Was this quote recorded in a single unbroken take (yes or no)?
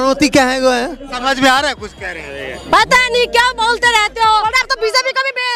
no